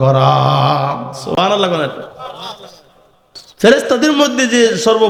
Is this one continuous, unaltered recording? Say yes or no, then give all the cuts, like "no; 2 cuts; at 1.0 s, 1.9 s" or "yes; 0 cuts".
yes; 0 cuts